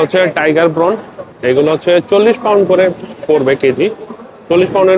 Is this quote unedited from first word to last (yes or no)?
yes